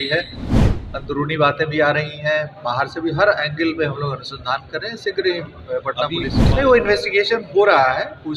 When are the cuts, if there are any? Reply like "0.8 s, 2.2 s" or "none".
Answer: 6.4 s

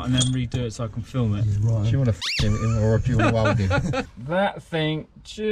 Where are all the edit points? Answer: 4.1 s

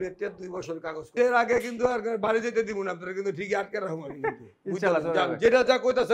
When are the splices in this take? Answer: 1.1 s

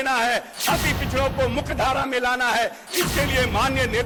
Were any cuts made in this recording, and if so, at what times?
none

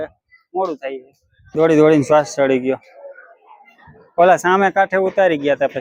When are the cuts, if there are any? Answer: 1.3 s

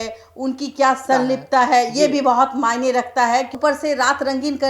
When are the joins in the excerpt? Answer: 1.0 s, 3.5 s

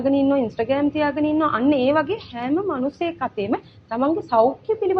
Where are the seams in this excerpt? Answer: none

